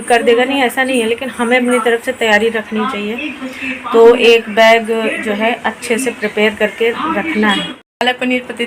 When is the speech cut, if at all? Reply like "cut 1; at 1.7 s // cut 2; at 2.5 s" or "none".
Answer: cut 1; at 7.7 s